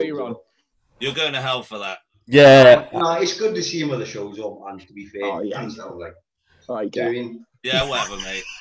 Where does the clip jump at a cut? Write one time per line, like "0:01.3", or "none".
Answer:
none